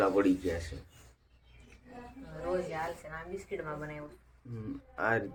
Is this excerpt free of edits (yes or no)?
yes